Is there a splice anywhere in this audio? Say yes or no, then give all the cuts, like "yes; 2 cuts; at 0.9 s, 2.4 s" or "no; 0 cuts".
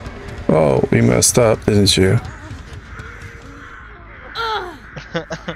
no; 0 cuts